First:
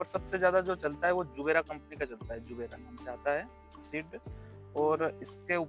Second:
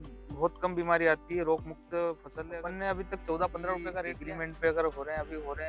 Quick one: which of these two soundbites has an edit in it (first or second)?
second